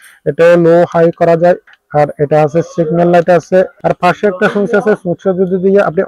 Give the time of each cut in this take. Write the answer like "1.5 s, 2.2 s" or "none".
1.7 s, 3.7 s